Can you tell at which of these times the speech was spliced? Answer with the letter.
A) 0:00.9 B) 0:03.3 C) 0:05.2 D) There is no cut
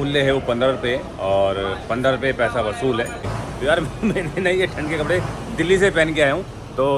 B